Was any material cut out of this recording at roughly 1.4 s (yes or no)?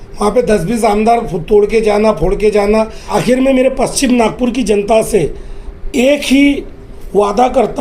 no